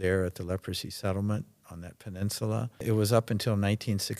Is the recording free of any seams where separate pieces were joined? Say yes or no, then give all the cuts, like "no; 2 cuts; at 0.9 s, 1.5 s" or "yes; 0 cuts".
no; 1 cut; at 2.8 s